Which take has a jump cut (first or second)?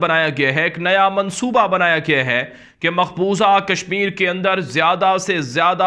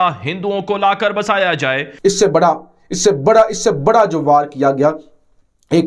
second